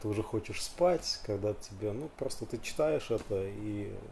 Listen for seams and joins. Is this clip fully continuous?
yes; 0 cuts

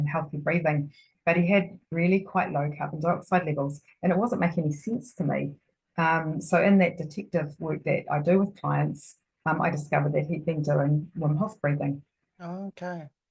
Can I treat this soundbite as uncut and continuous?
yes; 0 cuts

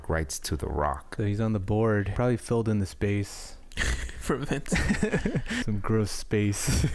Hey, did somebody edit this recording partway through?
yes; 3 cuts; at 1.1 s, 2.1 s, 5.6 s

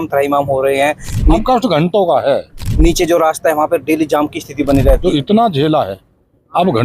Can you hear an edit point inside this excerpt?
yes; 3 cuts; at 1.3 s, 2.6 s, 5.0 s

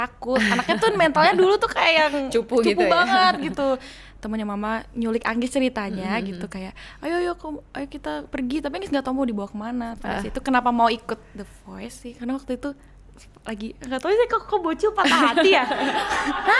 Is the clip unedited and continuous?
no; 3 cuts; at 4.0 s, 10.0 s, 12.1 s

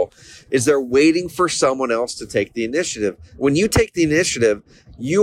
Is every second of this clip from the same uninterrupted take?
no; 1 cut; at 3.3 s

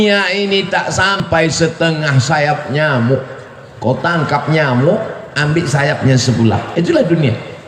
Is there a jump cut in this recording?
yes; 1 cut; at 1.2 s

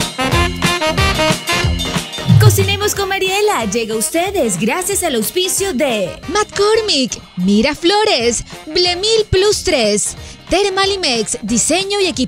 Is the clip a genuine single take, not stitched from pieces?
yes; 0 cuts

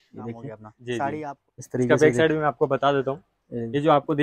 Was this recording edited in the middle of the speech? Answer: yes; 1 cut; at 1.4 s

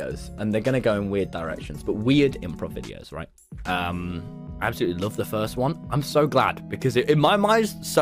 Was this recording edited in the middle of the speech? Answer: no; 0 cuts

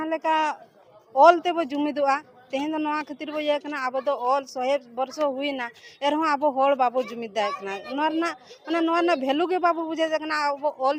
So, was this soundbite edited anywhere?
no; 0 cuts

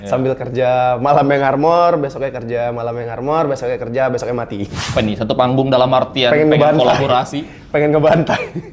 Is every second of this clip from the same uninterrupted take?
no; 1 cut; at 4.9 s

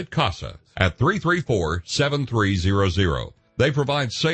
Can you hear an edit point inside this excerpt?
no; 0 cuts

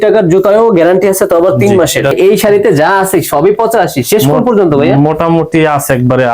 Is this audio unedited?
no; 1 cut; at 2.1 s

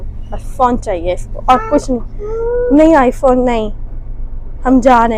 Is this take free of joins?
yes; 0 cuts

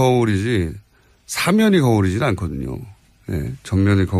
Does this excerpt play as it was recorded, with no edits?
yes; 0 cuts

